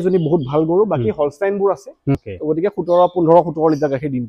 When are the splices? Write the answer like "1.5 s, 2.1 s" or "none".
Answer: 2.2 s